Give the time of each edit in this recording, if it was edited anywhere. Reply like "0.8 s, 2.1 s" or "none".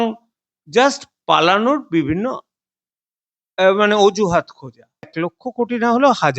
5.1 s